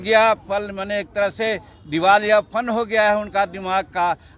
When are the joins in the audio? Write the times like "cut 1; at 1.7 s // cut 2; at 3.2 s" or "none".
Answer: none